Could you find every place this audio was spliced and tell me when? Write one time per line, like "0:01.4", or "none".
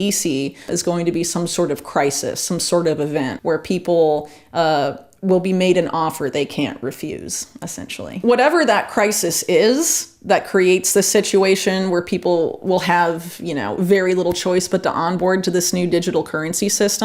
0:03.4
0:08.2